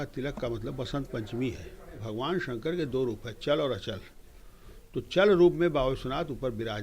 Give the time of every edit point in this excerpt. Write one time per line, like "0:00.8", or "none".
0:02.1

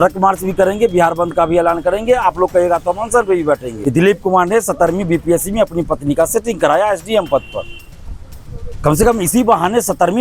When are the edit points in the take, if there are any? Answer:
0:03.7

